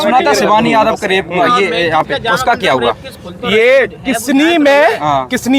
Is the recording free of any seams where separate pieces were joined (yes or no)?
yes